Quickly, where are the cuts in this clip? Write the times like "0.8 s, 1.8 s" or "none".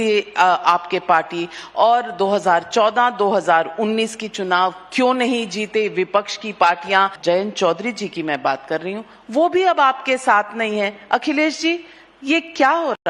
7.1 s